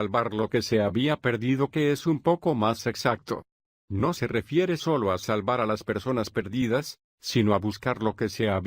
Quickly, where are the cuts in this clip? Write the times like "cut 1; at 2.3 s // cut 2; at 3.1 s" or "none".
cut 1; at 0.9 s // cut 2; at 2.9 s